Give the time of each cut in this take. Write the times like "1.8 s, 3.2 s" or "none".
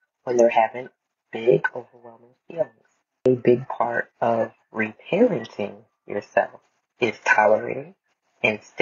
3.3 s